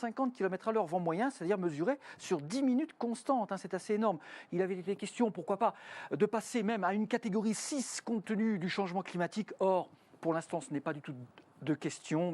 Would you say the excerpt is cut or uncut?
cut